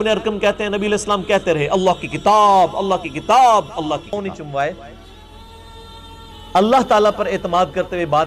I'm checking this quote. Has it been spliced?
yes; 1 cut; at 4.1 s

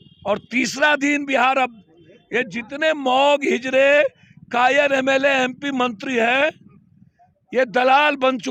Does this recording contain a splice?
no; 0 cuts

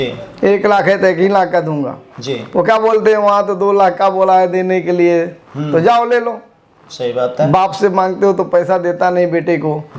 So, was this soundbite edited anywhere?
no; 0 cuts

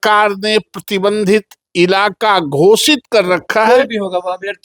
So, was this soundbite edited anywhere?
no; 0 cuts

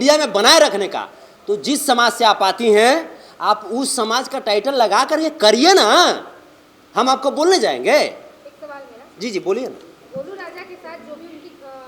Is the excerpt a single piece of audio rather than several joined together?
yes; 0 cuts

